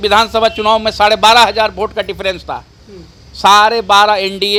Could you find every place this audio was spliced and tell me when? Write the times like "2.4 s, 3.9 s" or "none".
none

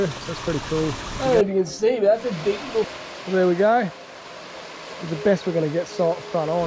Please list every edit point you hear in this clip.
1.1 s, 2.9 s

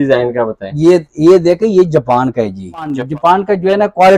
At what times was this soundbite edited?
3.0 s

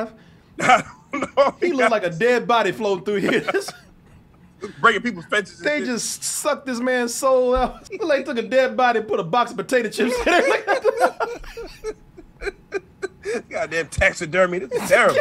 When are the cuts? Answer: 7.8 s

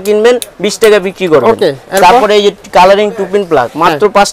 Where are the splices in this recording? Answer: none

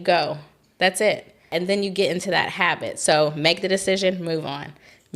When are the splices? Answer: 1.5 s

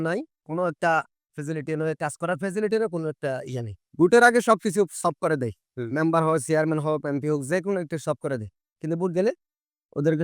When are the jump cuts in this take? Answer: 3.8 s

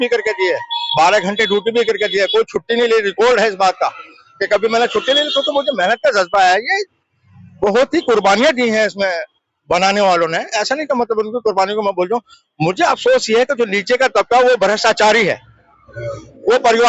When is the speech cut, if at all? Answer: none

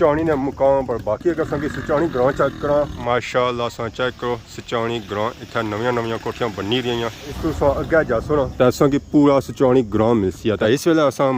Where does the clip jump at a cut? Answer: none

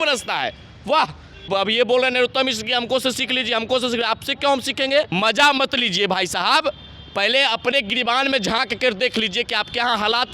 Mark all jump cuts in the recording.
1.5 s, 5.1 s

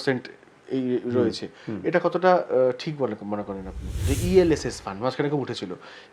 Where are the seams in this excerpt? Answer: 4.1 s

